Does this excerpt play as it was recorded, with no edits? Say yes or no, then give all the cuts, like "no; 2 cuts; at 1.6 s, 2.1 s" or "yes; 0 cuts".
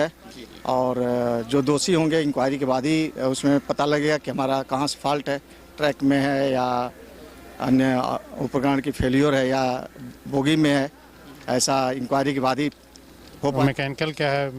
no; 1 cut; at 13.6 s